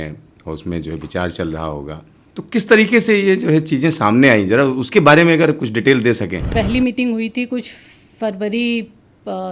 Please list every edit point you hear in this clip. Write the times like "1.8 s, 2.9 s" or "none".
6.4 s